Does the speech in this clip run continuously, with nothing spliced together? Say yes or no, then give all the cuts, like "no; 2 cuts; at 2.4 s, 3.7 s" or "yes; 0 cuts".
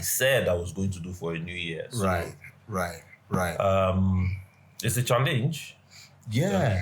yes; 0 cuts